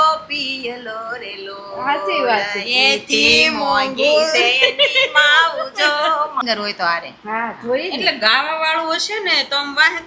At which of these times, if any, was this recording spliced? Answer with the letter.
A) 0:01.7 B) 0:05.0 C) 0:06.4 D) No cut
C